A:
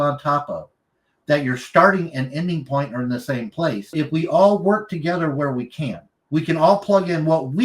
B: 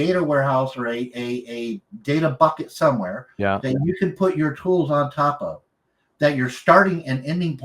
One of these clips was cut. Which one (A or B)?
A